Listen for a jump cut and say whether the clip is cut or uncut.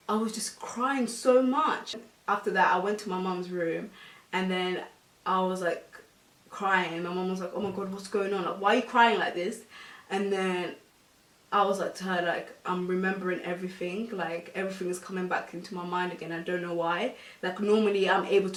uncut